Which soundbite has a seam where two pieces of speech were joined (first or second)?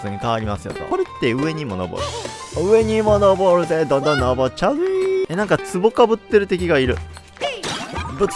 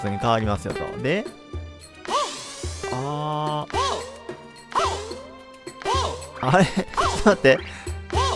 first